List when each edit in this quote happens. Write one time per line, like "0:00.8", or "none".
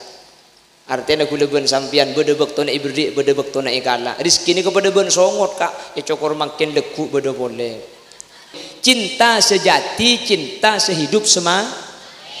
0:08.6